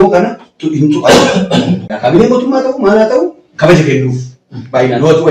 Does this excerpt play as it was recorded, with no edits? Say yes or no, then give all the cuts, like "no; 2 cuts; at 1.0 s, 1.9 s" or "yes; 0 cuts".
no; 1 cut; at 1.9 s